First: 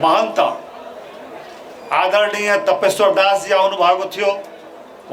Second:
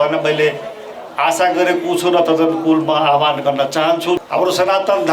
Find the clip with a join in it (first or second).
second